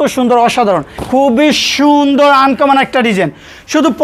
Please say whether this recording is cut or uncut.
cut